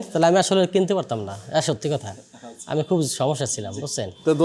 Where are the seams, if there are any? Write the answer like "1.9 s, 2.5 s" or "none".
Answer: none